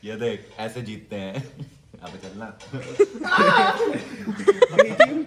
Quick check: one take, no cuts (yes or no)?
yes